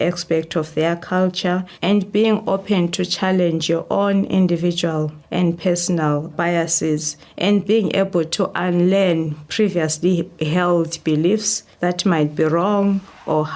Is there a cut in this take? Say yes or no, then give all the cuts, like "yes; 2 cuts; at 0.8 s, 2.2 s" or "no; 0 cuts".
yes; 1 cut; at 1.7 s